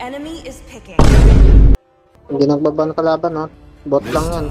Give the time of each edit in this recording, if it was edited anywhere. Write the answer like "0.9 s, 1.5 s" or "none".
0.9 s, 1.8 s, 3.6 s

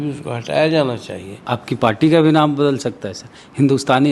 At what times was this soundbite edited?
1.3 s

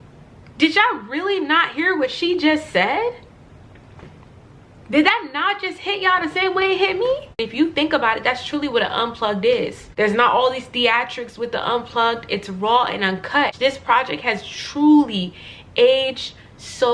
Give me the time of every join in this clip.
7.4 s, 9.8 s, 13.6 s

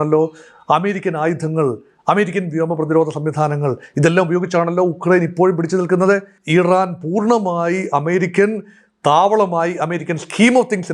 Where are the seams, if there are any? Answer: 6.3 s

